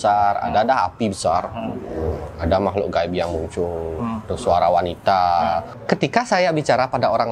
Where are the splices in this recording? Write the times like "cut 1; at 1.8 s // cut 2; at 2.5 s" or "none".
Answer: cut 1; at 5.7 s